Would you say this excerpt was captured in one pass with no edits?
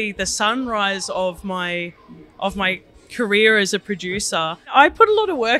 no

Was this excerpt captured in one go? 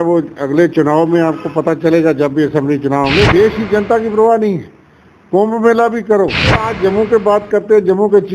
no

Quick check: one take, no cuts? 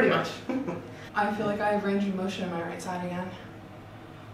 no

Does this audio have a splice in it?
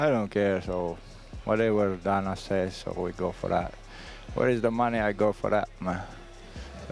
no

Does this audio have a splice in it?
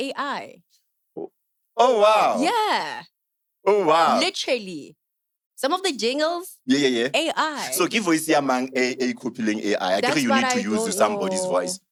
no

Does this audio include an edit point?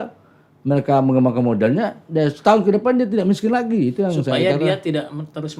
no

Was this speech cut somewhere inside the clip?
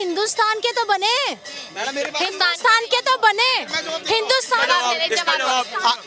no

